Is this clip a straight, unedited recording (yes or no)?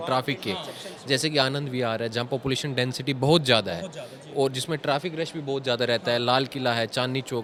yes